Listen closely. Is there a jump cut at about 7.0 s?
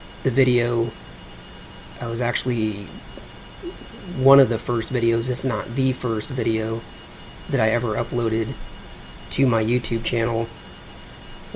yes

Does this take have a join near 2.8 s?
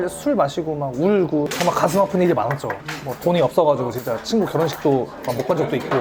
no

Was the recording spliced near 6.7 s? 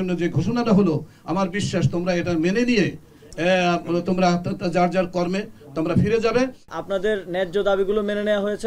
yes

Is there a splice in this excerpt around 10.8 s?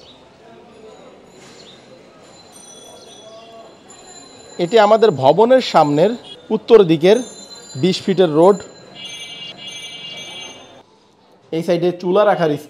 yes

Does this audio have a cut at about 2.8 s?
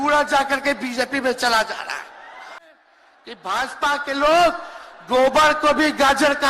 yes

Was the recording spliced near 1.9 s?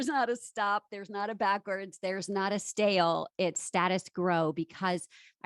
no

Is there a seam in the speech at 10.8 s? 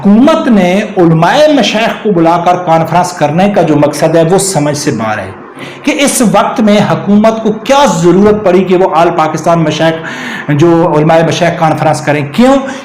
no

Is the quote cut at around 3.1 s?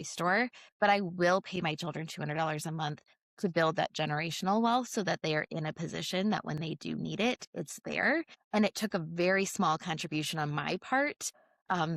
no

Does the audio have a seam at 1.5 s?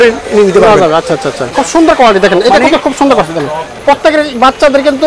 yes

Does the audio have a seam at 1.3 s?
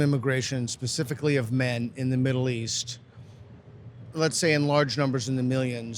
no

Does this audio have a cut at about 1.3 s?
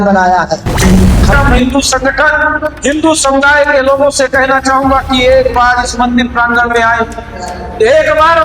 yes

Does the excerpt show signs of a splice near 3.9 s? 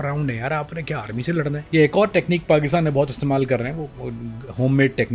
no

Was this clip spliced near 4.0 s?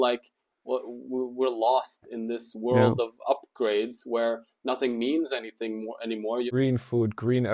no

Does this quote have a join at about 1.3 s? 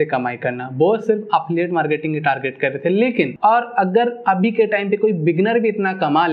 no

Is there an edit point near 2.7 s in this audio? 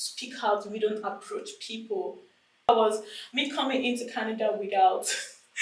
yes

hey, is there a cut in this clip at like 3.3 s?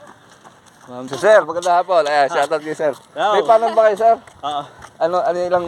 no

